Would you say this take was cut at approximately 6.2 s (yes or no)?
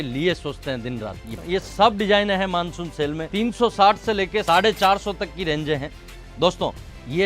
no